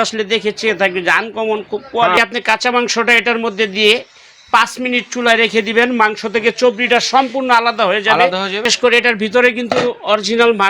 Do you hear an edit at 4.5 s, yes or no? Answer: no